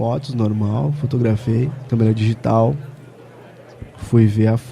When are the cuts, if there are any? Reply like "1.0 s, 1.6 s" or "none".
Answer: 1.8 s